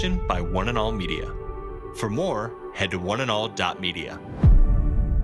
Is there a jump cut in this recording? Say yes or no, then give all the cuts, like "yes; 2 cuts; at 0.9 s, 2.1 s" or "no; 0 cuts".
no; 0 cuts